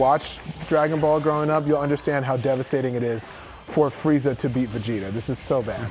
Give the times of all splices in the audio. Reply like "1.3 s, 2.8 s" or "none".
none